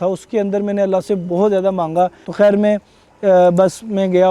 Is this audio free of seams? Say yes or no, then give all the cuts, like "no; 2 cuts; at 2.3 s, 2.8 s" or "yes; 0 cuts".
no; 1 cut; at 2.2 s